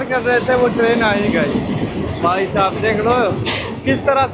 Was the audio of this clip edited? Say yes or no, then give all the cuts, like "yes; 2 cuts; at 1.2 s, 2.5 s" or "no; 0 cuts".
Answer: no; 0 cuts